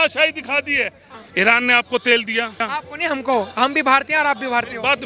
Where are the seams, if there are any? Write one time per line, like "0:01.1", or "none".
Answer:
0:01.0
0:02.6